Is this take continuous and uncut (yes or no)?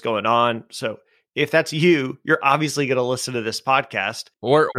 yes